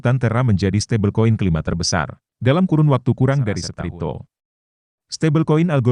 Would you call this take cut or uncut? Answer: cut